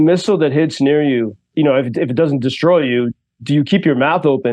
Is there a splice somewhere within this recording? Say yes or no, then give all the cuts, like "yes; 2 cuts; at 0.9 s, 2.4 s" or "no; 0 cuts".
yes; 1 cut; at 1.5 s